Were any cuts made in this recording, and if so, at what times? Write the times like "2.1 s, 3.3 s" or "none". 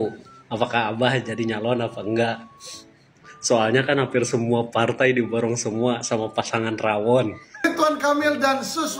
7.7 s

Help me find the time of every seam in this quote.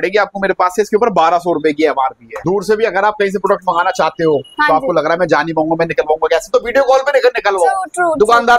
2.3 s

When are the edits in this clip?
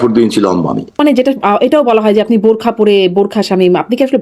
1.0 s

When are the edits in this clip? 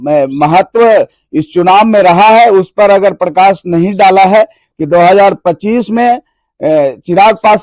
4.7 s

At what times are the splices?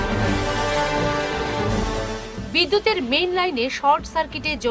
1.8 s

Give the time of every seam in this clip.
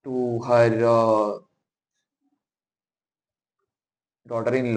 none

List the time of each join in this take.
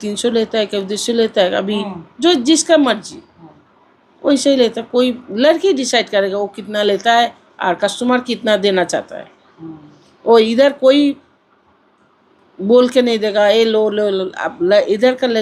none

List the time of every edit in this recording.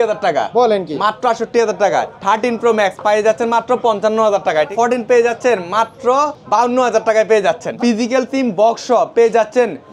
2.1 s, 4.7 s, 6.4 s, 7.7 s

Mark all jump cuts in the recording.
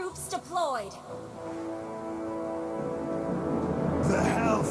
none

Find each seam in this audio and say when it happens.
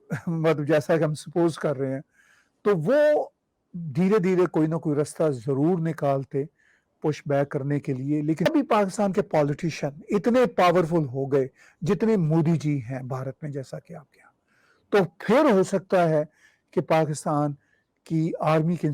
8.5 s

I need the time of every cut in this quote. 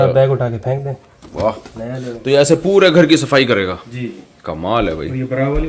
none

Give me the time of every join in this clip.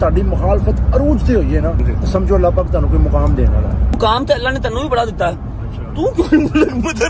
1.9 s, 4.0 s

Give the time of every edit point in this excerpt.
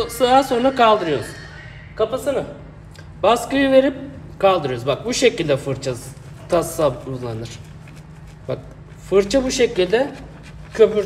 none

